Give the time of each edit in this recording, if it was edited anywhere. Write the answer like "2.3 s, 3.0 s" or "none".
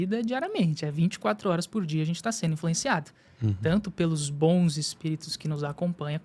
none